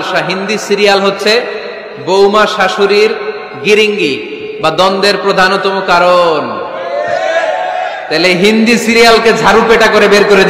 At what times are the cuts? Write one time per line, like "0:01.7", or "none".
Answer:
none